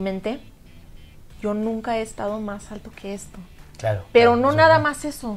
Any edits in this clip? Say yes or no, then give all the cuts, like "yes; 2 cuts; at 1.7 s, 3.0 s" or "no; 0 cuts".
no; 0 cuts